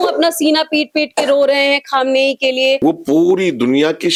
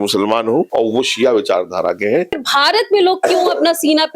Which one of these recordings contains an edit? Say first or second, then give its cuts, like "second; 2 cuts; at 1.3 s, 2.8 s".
second; 1 cut; at 2.3 s